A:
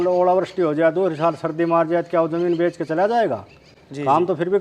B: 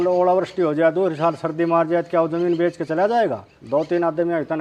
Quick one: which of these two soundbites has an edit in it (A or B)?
B